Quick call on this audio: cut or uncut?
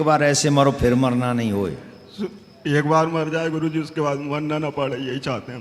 uncut